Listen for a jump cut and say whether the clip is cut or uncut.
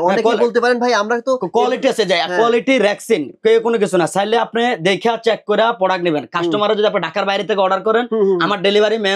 uncut